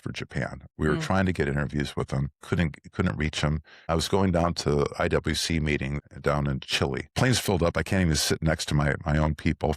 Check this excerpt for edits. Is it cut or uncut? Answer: cut